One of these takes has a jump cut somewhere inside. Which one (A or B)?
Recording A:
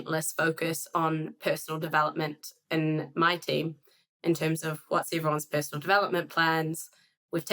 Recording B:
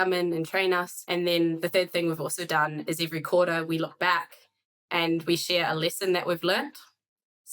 B